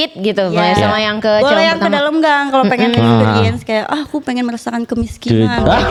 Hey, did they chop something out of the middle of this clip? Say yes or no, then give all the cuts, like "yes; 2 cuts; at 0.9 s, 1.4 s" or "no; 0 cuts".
no; 0 cuts